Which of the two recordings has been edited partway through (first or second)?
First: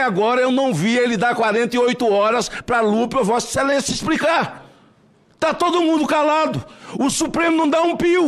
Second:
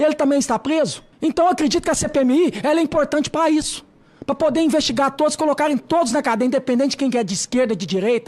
second